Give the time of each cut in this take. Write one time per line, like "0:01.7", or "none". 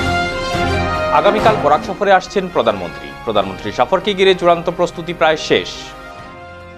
0:00.9